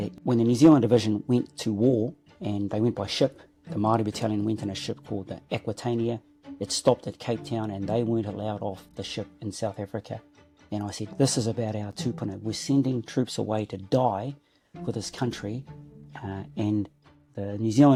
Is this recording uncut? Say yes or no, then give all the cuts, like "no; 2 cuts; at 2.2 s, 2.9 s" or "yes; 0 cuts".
yes; 0 cuts